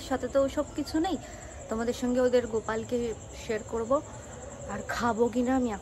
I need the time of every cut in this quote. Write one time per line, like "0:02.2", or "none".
none

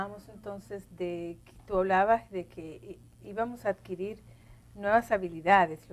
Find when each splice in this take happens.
0:04.9

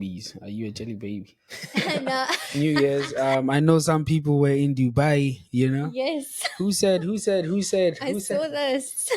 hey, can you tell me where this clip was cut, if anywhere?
0:02.5

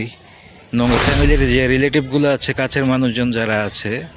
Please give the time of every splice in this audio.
0:01.0

